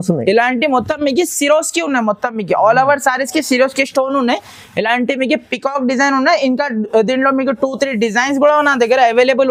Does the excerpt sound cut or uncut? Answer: uncut